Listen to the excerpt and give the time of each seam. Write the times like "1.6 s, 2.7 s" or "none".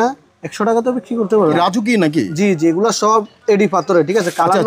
1.6 s